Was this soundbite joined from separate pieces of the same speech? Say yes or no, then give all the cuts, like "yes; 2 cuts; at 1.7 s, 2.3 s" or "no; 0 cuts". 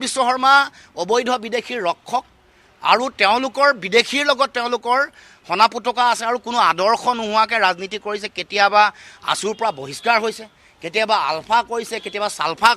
no; 0 cuts